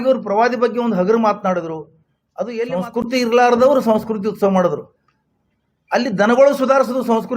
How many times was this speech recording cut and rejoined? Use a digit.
1